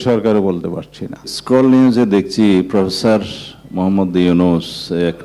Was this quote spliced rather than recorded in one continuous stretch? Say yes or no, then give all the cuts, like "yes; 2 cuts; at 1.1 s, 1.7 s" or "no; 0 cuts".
yes; 1 cut; at 1.3 s